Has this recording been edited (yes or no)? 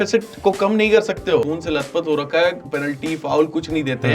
yes